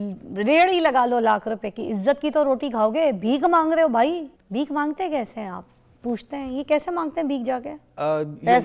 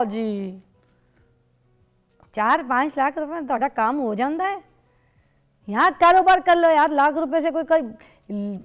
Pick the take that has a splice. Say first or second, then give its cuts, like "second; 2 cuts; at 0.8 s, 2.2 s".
first; 1 cut; at 4.4 s